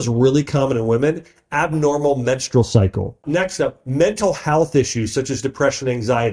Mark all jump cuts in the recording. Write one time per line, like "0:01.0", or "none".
0:03.2